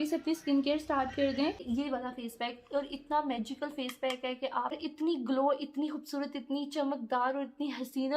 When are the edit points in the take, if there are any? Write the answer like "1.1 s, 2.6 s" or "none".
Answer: 1.6 s, 4.8 s